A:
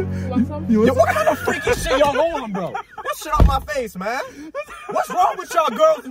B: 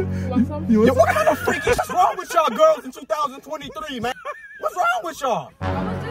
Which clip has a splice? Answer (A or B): B